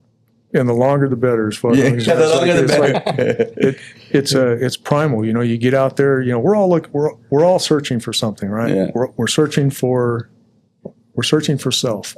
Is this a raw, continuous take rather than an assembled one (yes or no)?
yes